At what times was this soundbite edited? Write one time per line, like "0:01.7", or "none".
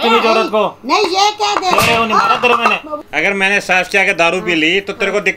0:03.0